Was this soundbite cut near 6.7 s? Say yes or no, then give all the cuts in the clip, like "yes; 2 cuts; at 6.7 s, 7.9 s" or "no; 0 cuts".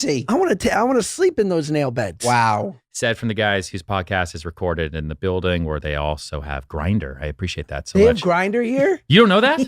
no; 1 cut; at 2.8 s